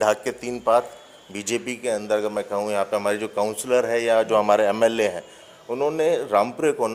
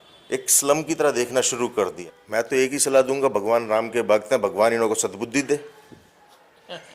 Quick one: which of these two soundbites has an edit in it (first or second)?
second